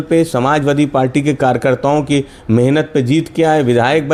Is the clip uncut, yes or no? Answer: yes